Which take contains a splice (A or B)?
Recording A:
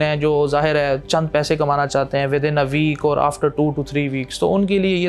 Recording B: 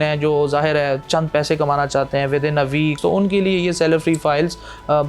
B